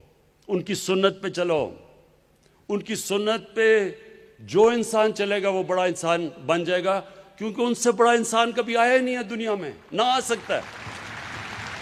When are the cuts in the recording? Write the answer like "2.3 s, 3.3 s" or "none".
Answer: none

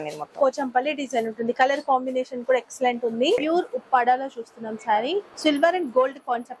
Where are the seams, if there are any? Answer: 3.4 s, 5.3 s

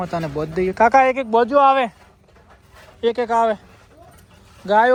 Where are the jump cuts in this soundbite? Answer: none

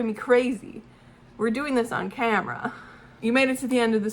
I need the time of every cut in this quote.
3.1 s

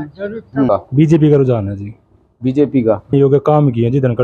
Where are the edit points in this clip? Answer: 0.7 s, 3.1 s

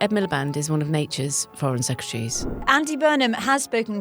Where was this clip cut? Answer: 2.6 s

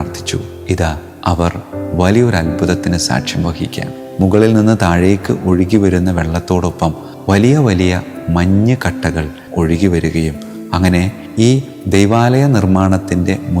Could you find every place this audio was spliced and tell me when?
none

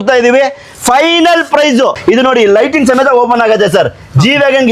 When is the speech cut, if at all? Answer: 2.0 s

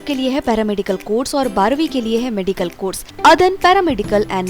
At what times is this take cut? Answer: 3.1 s

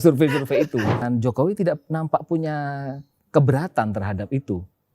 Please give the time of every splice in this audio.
1.0 s

